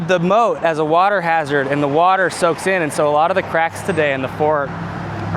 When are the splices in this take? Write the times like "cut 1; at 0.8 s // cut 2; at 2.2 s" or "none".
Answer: none